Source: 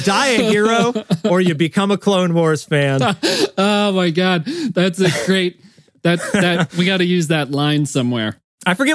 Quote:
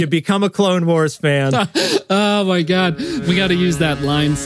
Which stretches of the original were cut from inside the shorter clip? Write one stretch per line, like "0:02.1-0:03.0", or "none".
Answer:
0:04.7-0:06.7

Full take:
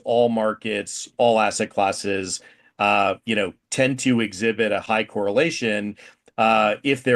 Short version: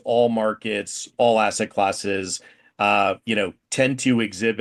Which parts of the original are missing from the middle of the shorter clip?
none

